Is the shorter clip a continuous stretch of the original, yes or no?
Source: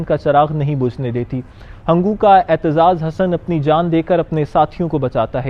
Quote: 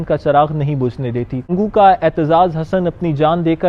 no